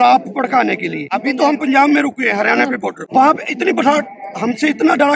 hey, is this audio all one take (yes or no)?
no